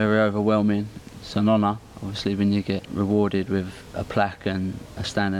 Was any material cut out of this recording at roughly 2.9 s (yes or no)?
yes